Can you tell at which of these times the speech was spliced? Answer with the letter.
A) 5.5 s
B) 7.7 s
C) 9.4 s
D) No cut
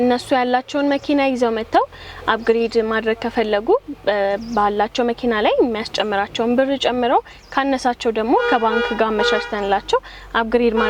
D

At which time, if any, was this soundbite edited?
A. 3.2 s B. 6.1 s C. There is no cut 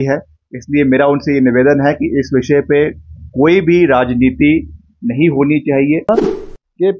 B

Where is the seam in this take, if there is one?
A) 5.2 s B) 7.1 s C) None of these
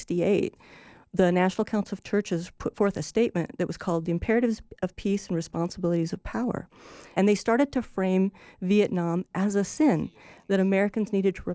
B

